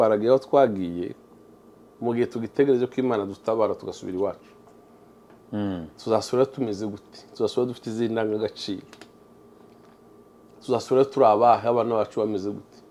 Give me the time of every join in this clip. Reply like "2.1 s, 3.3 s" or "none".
none